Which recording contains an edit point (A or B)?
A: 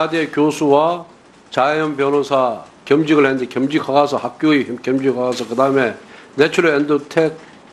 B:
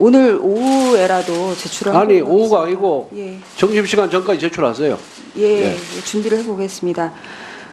B